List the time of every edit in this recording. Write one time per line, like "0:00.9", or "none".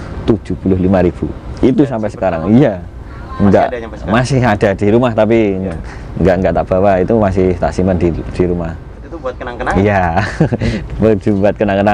none